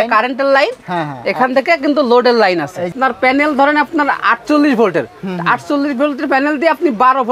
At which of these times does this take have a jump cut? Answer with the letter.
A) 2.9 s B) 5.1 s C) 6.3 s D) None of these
A